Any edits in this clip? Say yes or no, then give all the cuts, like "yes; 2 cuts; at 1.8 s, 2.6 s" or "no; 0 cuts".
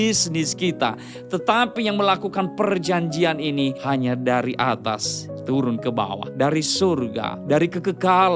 yes; 3 cuts; at 3.8 s, 6.2 s, 7.3 s